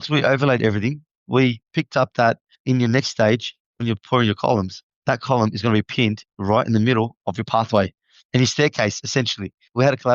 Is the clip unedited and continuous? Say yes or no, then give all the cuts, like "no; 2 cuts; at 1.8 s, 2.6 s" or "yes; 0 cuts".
yes; 0 cuts